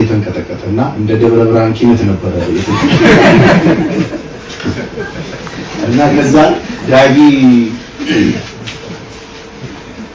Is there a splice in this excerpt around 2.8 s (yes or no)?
no